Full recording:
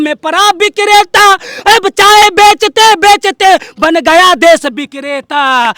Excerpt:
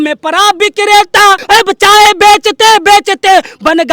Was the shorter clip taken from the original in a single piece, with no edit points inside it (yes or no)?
no